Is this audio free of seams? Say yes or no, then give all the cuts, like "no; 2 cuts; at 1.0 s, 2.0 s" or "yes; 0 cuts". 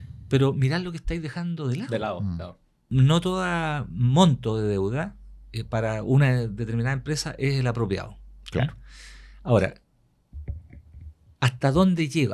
no; 1 cut; at 2.9 s